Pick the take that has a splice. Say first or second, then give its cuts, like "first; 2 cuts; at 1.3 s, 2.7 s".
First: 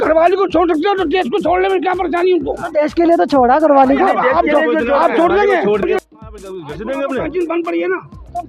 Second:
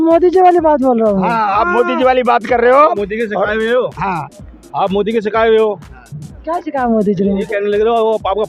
first; 1 cut; at 5.8 s